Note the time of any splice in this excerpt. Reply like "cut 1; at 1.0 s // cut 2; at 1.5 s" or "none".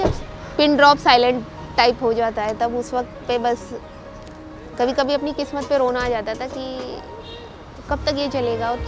none